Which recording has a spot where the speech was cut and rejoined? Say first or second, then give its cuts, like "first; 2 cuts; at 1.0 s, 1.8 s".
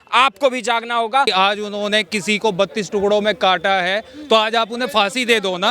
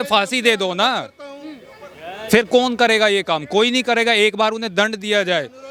first; 1 cut; at 1.3 s